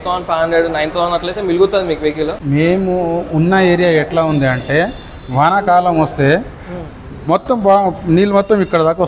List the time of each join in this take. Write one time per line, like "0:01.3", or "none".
0:02.4